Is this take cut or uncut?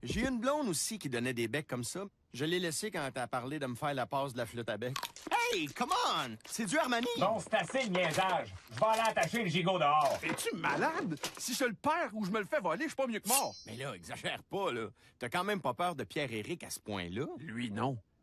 cut